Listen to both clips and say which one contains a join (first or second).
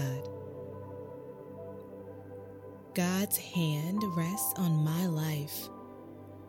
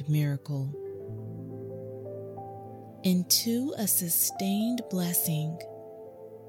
second